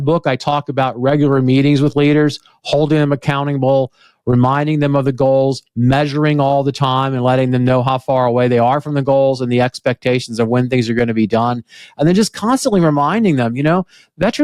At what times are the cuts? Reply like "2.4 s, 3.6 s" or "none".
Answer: none